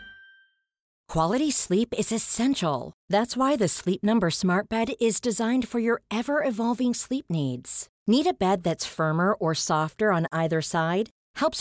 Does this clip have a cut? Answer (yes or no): yes